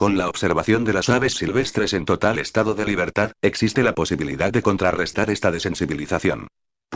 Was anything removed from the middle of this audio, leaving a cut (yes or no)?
no